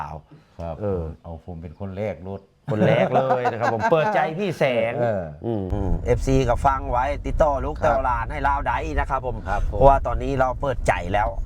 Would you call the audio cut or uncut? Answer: cut